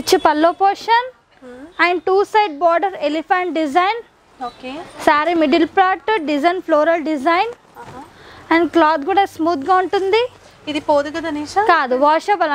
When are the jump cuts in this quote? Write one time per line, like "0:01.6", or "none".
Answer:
none